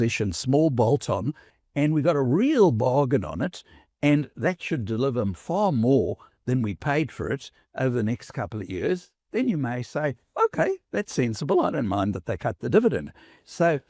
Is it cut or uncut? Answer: cut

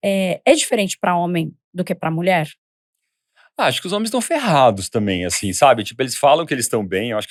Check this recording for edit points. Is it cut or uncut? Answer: uncut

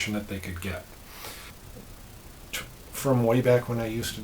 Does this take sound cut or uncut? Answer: cut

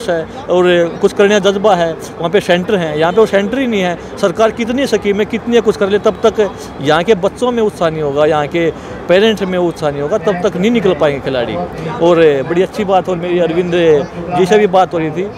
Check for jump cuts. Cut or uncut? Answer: uncut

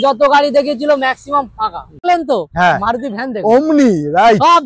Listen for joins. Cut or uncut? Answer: cut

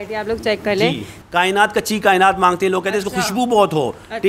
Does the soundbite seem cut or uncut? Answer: cut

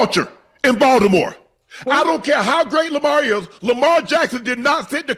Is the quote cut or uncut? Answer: uncut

